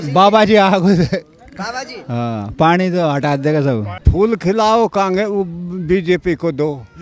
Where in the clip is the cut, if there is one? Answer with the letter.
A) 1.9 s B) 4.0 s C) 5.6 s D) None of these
B